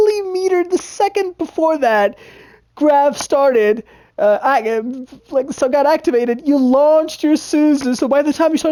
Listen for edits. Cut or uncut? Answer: uncut